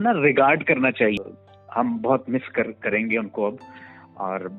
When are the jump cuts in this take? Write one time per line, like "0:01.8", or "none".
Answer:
0:01.2